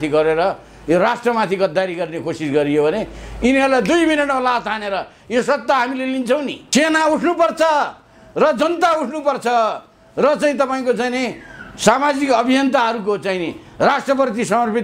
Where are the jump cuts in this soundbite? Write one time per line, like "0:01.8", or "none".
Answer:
0:06.6

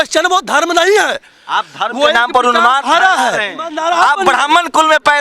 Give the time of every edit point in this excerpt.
0:03.8

